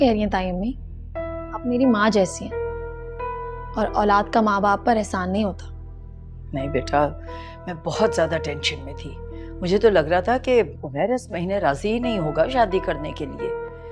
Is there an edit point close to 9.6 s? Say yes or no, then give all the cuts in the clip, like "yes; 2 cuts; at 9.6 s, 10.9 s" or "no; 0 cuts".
no; 2 cuts; at 2.3 s, 3.7 s